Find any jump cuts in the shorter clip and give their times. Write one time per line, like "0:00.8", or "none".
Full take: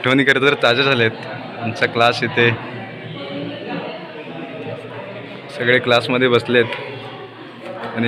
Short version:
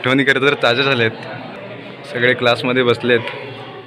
0:01.5